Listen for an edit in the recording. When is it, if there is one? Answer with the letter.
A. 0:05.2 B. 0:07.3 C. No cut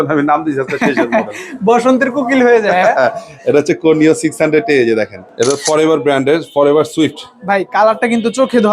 A